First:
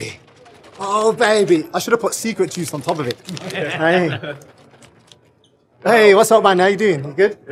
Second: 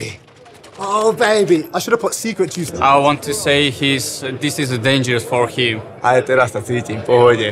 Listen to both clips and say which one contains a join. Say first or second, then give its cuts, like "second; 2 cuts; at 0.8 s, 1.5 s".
second; 2 cuts; at 2.6 s, 6.0 s